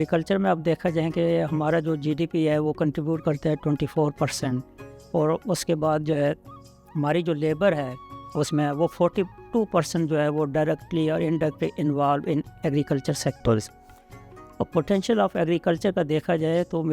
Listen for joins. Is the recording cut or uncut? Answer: uncut